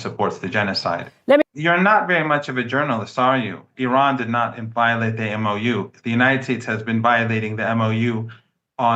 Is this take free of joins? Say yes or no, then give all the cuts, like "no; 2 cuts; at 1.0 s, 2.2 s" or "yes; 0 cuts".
no; 1 cut; at 1.4 s